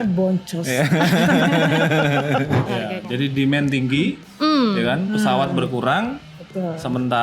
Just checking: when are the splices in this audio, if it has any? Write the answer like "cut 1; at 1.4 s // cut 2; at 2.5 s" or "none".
cut 1; at 2.7 s